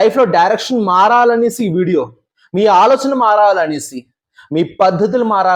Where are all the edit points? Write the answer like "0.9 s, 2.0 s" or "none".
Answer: none